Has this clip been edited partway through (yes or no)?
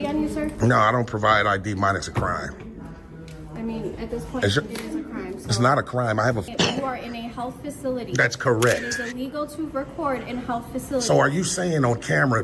yes